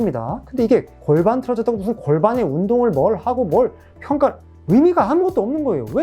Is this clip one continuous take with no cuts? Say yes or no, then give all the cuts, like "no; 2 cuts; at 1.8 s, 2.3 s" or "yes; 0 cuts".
no; 1 cut; at 0.9 s